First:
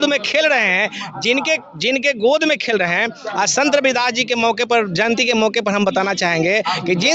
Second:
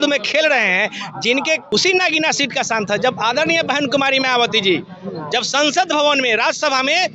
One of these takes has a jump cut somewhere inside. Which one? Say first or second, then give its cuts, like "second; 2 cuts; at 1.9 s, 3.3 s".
second; 1 cut; at 1.6 s